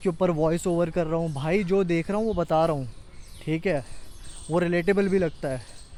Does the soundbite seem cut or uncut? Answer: uncut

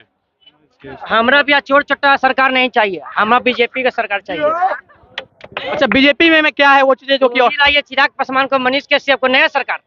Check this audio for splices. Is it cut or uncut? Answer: cut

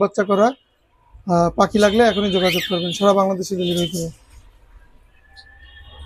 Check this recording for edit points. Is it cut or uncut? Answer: uncut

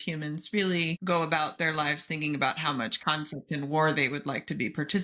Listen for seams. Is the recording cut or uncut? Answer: uncut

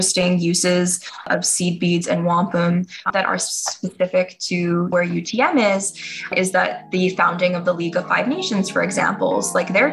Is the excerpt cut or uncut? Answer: cut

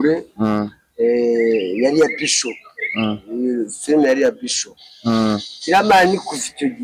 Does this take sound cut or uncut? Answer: uncut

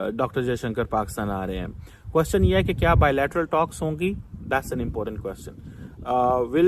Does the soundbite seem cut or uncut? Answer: uncut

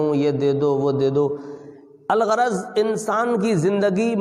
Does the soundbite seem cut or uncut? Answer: uncut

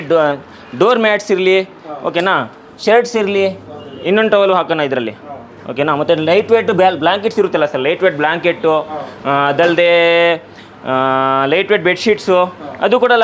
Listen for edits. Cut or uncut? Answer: uncut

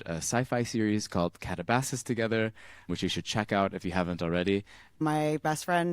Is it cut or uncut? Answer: cut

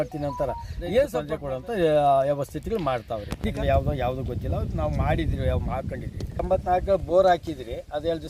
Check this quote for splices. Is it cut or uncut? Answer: cut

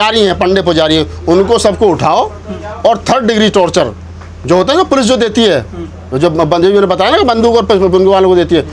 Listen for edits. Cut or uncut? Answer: uncut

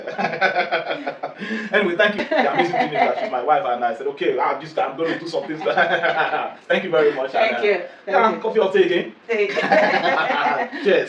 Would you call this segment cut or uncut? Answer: cut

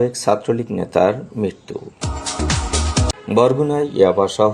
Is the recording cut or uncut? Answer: cut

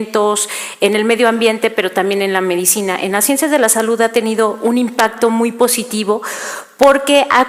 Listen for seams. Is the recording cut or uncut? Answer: cut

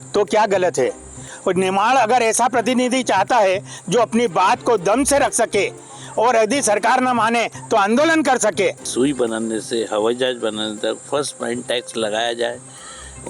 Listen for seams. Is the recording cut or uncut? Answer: cut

